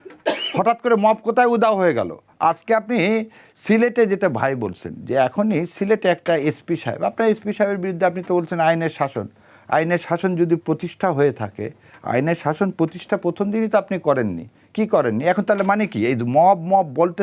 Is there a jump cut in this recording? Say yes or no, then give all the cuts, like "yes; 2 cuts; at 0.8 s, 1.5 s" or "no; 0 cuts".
no; 0 cuts